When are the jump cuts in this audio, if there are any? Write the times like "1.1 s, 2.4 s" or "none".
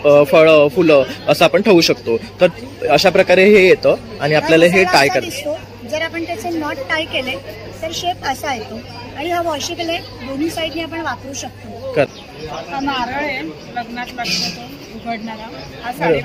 12.1 s